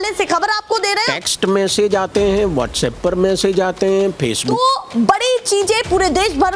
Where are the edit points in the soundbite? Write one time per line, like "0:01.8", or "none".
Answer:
0:01.1
0:04.5